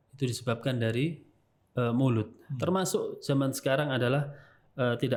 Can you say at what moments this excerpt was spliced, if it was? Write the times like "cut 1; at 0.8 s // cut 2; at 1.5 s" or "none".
none